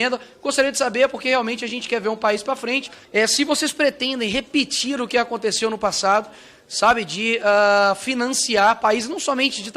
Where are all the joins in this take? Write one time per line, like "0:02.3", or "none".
0:02.9

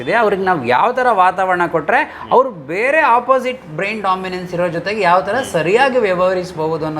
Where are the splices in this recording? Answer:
none

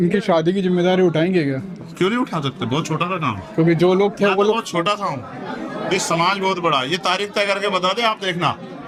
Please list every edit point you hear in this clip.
none

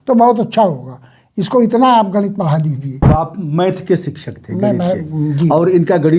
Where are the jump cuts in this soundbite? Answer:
0:03.1

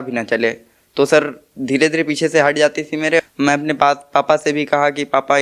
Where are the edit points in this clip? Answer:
0:03.2

